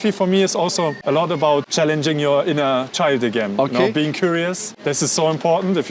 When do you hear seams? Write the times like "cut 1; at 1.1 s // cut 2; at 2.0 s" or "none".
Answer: cut 1; at 1.0 s // cut 2; at 1.7 s // cut 3; at 4.7 s